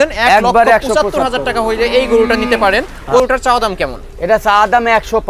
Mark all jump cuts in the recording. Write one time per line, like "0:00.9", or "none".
0:03.2

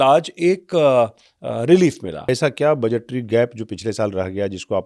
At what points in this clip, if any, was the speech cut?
0:02.3

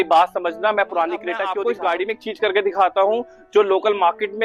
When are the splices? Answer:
0:01.4

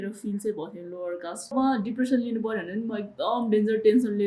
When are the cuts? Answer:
0:01.5

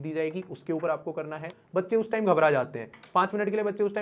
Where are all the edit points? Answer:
0:01.6

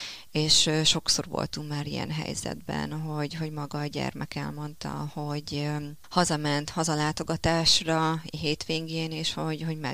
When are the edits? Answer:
0:06.0

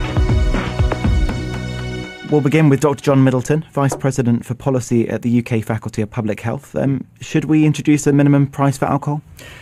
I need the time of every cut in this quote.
none

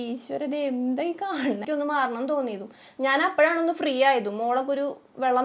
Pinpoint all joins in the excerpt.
0:01.6

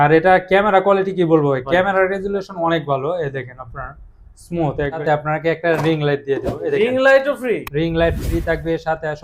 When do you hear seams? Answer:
0:05.0

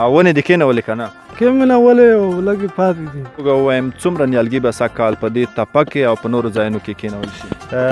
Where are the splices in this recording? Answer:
0:03.4

